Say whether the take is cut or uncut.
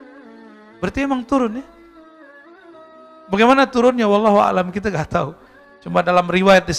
cut